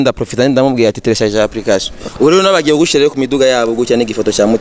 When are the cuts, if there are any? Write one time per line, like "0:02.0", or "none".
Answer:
0:02.0